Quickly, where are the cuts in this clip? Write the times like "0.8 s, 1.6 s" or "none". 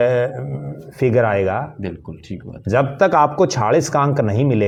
none